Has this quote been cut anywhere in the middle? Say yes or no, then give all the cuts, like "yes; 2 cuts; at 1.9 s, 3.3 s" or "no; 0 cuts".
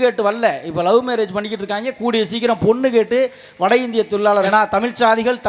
yes; 1 cut; at 4.5 s